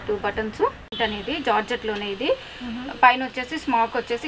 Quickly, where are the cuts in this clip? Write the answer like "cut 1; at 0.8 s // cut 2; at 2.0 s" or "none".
cut 1; at 0.9 s